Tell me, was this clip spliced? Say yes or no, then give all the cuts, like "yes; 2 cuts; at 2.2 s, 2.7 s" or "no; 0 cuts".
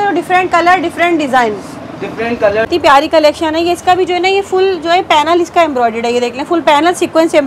yes; 1 cut; at 2.7 s